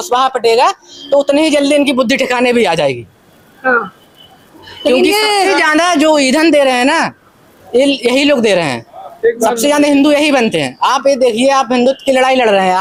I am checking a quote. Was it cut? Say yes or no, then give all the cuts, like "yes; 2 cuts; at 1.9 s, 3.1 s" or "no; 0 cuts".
no; 0 cuts